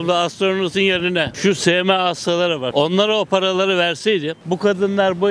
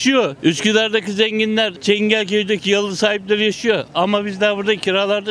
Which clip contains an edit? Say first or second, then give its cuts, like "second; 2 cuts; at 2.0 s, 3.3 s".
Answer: first; 2 cuts; at 1.3 s, 2.7 s